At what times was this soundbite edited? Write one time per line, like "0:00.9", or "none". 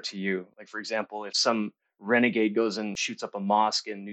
0:01.4
0:03.0